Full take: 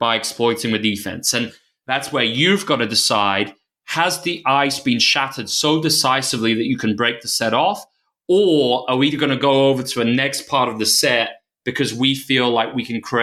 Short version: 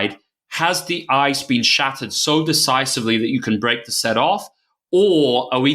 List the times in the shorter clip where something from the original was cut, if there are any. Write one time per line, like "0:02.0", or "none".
none